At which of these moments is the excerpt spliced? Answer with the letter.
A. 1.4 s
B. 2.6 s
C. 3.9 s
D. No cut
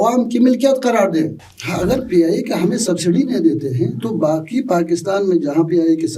A